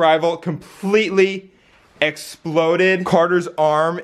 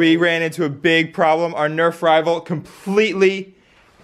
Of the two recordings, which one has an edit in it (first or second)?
first